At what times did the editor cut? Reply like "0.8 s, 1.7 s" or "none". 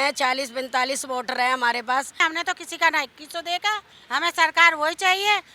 2.2 s, 3.9 s